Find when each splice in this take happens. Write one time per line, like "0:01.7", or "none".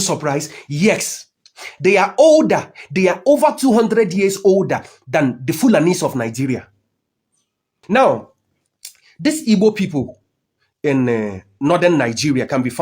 0:07.7